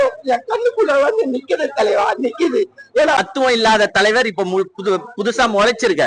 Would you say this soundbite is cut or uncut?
cut